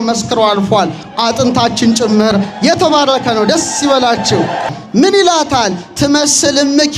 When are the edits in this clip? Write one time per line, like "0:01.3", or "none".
0:04.7